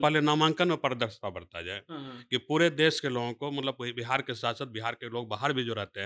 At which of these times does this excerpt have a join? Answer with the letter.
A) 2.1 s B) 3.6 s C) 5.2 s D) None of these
D